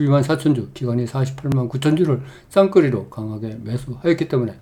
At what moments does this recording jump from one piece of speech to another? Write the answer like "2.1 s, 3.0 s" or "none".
none